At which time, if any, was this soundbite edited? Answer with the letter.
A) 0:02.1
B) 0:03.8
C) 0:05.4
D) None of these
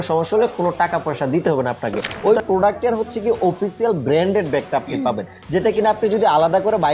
A